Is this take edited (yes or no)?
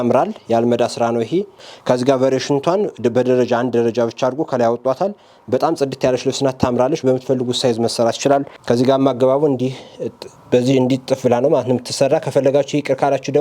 yes